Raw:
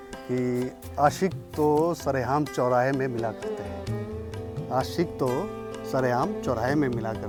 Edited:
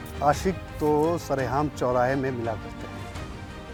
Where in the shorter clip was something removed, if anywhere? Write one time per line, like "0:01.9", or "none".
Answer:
none